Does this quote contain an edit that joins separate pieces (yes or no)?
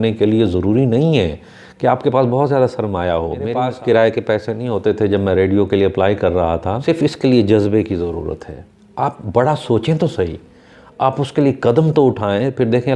yes